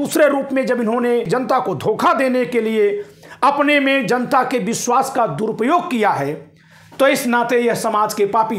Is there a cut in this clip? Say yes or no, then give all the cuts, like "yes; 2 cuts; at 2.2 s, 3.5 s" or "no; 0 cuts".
yes; 1 cut; at 1.3 s